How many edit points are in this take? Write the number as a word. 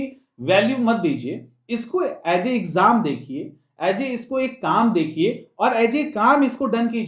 zero